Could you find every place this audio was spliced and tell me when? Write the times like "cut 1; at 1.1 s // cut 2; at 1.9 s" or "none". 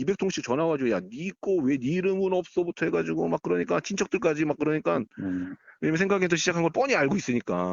none